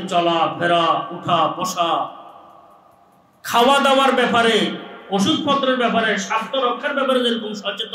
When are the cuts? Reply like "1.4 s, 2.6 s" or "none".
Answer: none